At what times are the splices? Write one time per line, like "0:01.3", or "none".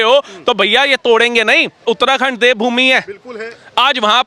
0:01.8